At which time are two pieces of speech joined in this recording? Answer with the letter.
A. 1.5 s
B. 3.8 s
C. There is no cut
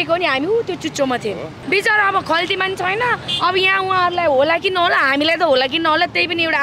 A